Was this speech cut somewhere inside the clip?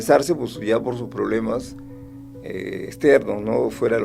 no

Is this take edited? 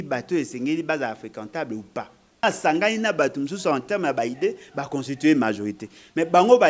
yes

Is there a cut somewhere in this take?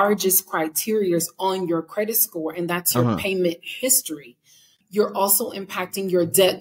yes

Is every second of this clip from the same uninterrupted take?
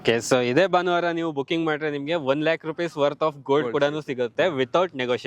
no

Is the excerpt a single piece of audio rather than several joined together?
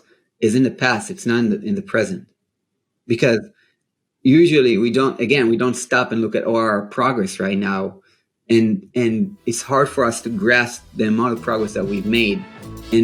yes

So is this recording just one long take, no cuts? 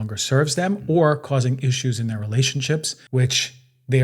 no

